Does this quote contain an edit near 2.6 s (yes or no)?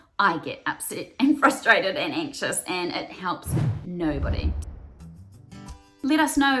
no